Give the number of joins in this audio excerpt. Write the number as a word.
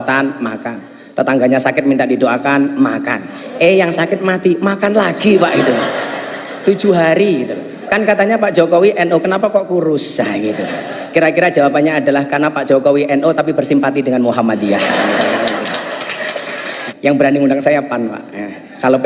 two